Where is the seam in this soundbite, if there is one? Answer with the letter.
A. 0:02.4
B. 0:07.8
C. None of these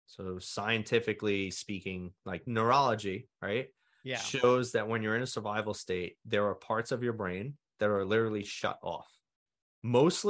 A